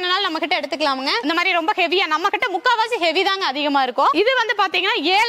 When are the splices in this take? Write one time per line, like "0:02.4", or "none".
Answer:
0:01.2
0:04.1